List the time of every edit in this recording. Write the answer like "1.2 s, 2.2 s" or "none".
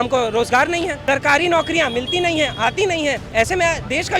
1.0 s, 3.2 s

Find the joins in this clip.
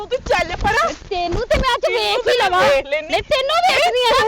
none

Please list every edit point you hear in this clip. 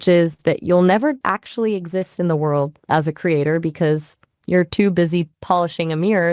1.2 s

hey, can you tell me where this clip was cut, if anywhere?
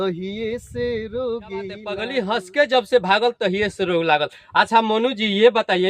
2.0 s

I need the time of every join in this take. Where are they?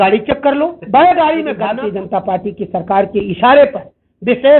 1.7 s

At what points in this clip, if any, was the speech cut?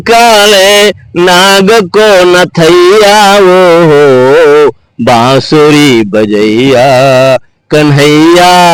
none

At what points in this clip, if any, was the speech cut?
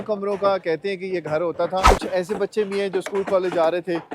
1.9 s

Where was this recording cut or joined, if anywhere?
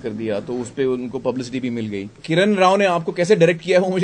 2.2 s

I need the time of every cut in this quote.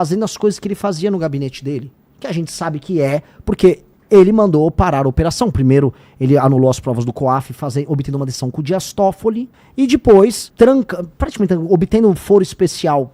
9.6 s, 10.4 s

